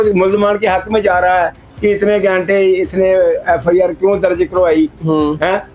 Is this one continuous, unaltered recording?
yes; 0 cuts

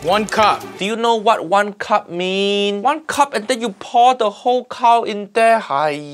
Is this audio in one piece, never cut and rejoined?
no; 1 cut; at 2.8 s

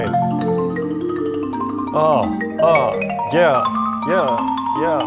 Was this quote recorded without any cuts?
yes; 0 cuts

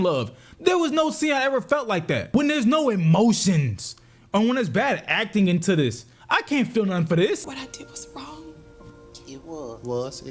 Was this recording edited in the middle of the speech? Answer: yes; 2 cuts; at 2.3 s, 7.4 s

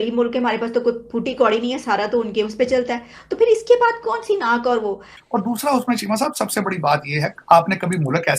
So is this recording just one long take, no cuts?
no; 1 cut; at 5.2 s

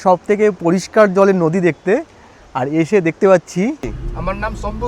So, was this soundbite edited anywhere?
yes; 1 cut; at 3.9 s

